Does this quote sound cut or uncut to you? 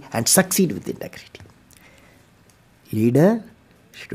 uncut